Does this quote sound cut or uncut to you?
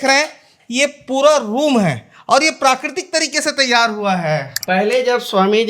cut